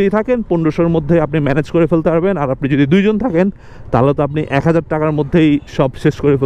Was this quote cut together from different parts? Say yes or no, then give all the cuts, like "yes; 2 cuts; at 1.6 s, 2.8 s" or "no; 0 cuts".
no; 0 cuts